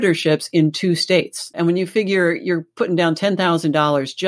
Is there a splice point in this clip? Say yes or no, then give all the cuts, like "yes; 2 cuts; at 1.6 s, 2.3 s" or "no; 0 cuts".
yes; 1 cut; at 1.5 s